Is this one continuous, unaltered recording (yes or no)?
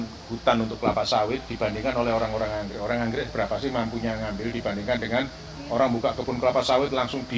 yes